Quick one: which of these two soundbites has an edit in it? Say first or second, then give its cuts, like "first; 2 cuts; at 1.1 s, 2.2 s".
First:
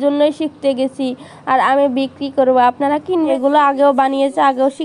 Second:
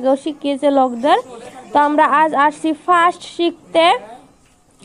first; 1 cut; at 3.3 s